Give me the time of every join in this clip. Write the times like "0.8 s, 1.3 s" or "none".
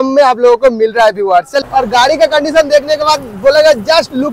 1.6 s